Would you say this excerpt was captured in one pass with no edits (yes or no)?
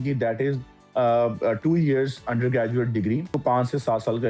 no